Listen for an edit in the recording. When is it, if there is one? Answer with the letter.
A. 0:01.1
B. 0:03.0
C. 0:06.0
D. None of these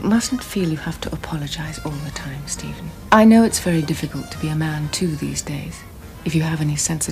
B